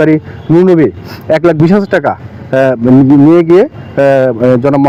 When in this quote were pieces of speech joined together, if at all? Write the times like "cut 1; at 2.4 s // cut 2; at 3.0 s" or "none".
none